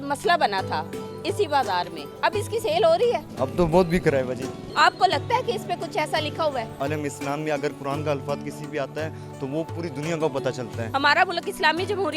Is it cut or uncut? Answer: cut